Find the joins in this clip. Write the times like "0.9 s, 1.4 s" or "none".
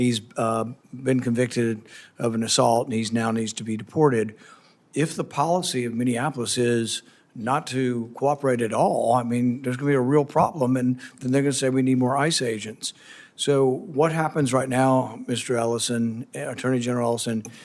none